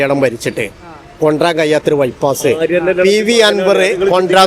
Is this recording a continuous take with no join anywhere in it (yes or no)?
yes